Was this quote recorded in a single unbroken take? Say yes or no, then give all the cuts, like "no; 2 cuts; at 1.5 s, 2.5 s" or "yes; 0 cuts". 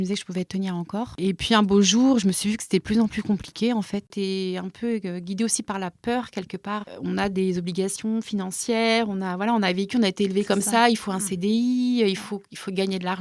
no; 3 cuts; at 1.1 s, 4.1 s, 6.9 s